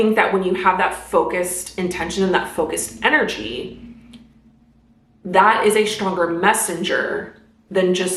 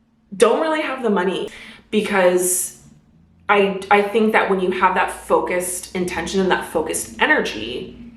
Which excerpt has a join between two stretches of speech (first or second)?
second